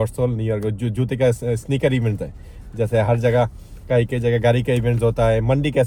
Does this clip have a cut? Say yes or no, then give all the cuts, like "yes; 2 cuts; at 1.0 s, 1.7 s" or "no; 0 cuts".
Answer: no; 0 cuts